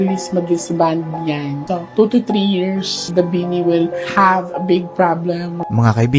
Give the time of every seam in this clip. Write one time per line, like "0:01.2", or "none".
0:03.2